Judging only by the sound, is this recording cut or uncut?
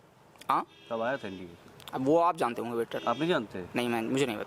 uncut